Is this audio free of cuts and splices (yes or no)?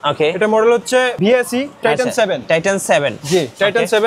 no